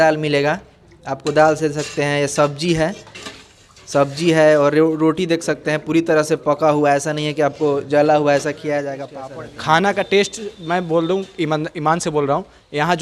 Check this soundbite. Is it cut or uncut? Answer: cut